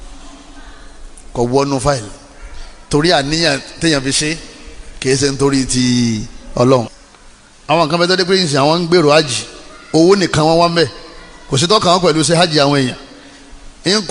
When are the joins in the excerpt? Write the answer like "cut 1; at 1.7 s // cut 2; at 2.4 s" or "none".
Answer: cut 1; at 6.9 s